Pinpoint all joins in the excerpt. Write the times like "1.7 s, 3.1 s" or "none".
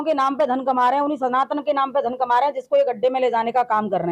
none